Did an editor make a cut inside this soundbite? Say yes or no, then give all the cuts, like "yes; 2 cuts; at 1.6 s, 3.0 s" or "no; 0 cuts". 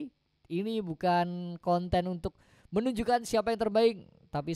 no; 0 cuts